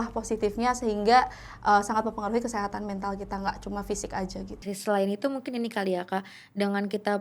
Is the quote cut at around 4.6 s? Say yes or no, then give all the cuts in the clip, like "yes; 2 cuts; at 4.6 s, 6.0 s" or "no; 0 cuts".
yes; 1 cut; at 4.6 s